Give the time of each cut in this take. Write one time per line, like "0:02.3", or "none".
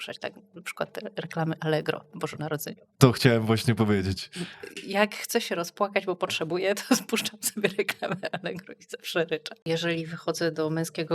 0:09.7